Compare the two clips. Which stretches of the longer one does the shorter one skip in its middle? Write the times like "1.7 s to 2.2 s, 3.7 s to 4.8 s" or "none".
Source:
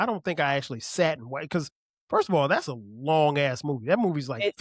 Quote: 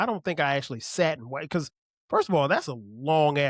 none